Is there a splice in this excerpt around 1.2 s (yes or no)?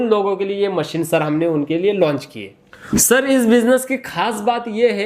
no